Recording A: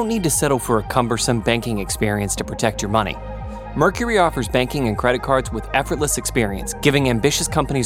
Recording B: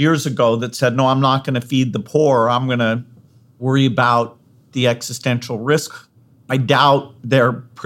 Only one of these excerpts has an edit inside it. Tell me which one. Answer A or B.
B